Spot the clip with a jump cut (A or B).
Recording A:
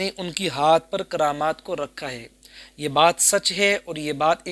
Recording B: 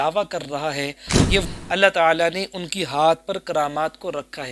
B